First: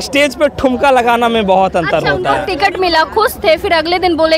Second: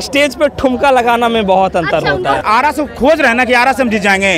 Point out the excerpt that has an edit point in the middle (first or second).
second